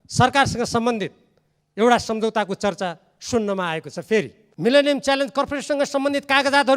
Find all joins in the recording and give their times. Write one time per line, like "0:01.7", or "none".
0:04.4